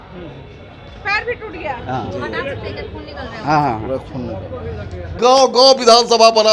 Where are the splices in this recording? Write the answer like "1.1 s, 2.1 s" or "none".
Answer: 5.2 s